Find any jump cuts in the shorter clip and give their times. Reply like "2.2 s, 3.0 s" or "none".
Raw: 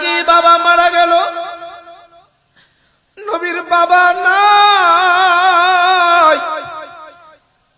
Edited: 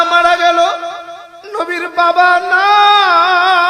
1.3 s